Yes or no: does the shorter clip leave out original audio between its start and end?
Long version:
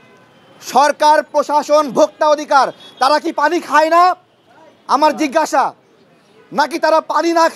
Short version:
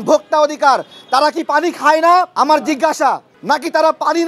yes